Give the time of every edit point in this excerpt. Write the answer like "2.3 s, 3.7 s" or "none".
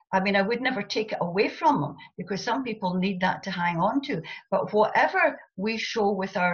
none